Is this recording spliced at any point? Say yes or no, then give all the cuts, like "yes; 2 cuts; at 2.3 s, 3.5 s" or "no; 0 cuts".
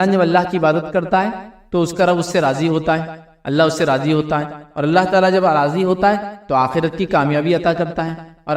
no; 0 cuts